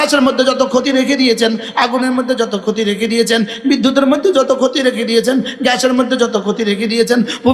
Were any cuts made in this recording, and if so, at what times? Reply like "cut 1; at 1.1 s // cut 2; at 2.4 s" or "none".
none